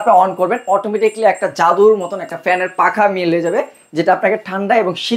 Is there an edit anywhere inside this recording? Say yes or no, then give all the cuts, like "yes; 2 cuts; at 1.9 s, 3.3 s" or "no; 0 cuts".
no; 0 cuts